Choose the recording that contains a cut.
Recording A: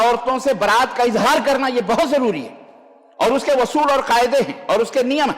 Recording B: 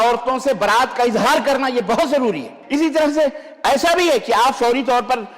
B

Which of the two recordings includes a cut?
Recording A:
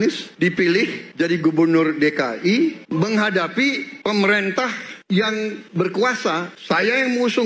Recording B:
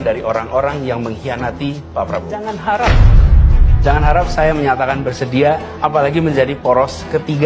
B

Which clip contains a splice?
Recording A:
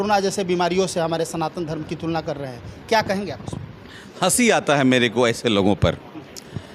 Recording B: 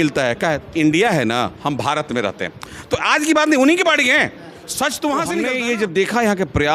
B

